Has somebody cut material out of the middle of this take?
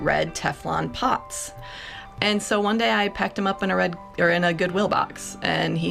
yes; 1 cut; at 1.5 s

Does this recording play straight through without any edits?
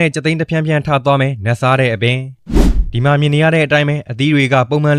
yes; 0 cuts

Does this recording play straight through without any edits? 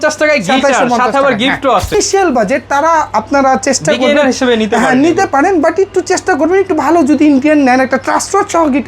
no; 1 cut; at 2.0 s

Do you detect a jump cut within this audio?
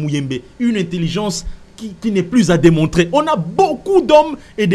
no; 0 cuts

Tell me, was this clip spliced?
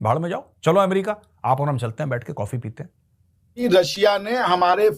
yes; 1 cut; at 3.5 s

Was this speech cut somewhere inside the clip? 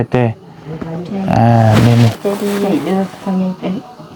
yes; 1 cut; at 2.2 s

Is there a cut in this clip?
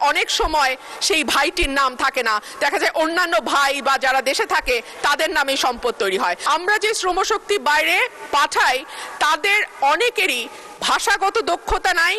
yes; 1 cut; at 6.4 s

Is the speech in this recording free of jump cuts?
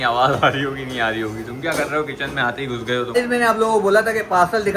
no; 1 cut; at 3.1 s

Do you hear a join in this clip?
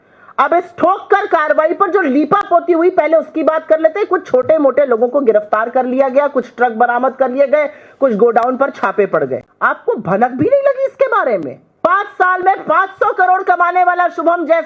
yes; 2 cuts; at 9.5 s, 11.6 s

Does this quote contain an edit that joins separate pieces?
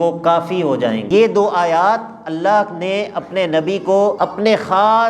yes; 2 cuts; at 1.1 s, 4.2 s

